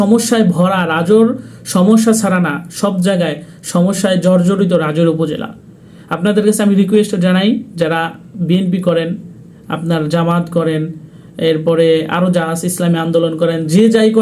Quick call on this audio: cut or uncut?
uncut